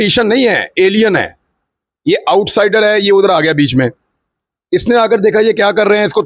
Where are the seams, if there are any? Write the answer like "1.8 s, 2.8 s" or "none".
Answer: none